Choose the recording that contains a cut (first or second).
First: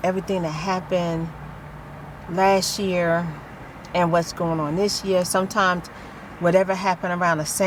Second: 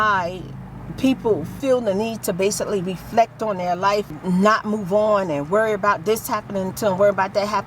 second